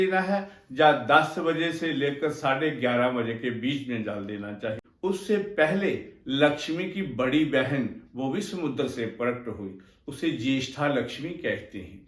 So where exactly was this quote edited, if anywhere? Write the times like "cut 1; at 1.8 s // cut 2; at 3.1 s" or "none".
cut 1; at 4.9 s

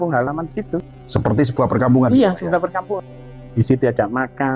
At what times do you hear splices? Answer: cut 1; at 1.0 s // cut 2; at 3.5 s

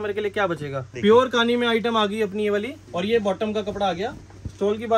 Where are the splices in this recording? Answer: cut 1; at 0.9 s // cut 2; at 2.8 s

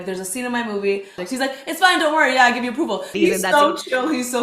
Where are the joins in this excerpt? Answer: cut 1; at 1.2 s // cut 2; at 3.1 s

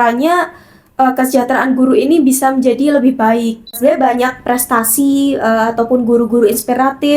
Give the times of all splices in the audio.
cut 1; at 3.8 s

